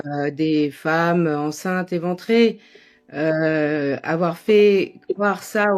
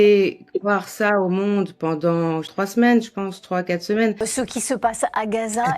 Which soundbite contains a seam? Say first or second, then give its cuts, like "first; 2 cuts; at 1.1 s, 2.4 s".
second; 2 cuts; at 2.5 s, 4.2 s